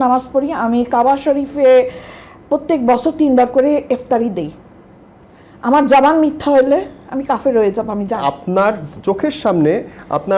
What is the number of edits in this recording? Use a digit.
1